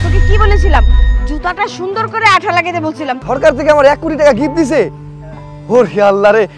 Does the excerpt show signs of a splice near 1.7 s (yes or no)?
no